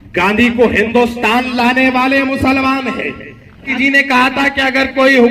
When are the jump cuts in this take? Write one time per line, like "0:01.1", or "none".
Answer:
0:03.7